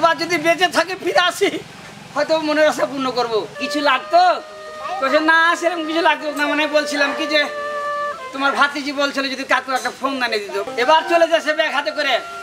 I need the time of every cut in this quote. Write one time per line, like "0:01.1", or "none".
0:03.6
0:10.7

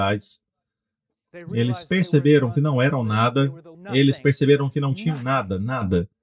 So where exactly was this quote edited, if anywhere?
0:03.7

